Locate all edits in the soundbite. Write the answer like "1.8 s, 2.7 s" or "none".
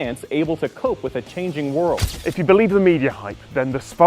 2.1 s